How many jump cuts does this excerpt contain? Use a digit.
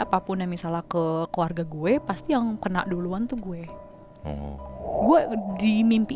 1